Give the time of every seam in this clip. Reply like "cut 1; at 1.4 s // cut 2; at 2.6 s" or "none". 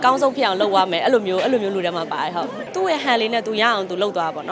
cut 1; at 2.6 s